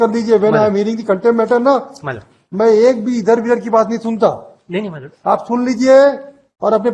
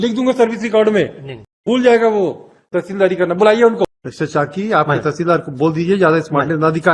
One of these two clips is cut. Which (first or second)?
second